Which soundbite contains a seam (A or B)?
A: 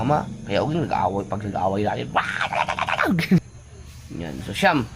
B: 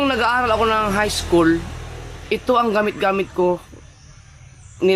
A